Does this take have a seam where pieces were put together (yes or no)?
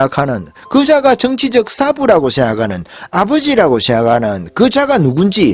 no